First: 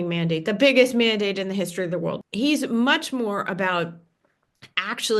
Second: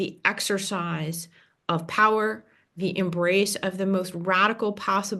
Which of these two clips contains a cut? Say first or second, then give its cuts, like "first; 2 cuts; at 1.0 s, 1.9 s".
first; 1 cut; at 2.2 s